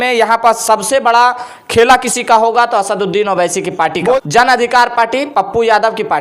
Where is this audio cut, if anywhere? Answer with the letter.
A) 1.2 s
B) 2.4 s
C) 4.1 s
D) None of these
C